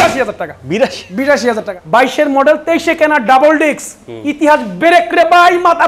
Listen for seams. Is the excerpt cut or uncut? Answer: cut